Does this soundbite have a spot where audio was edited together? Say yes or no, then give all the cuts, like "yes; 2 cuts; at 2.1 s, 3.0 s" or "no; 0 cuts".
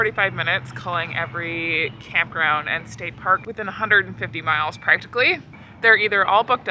no; 0 cuts